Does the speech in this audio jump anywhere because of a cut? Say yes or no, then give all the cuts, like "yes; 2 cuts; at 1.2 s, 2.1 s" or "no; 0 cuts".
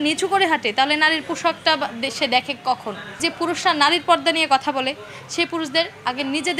yes; 1 cut; at 3.2 s